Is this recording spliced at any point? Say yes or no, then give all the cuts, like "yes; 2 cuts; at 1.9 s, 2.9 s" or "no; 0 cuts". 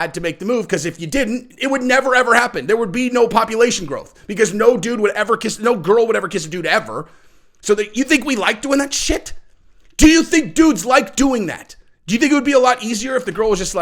no; 0 cuts